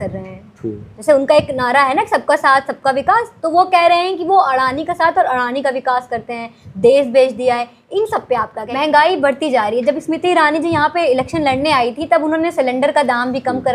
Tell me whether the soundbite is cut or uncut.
cut